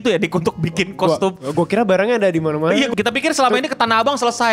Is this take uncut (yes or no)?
no